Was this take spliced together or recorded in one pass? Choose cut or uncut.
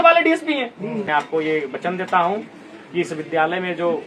cut